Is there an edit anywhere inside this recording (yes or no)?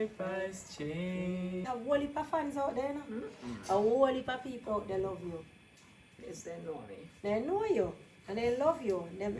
yes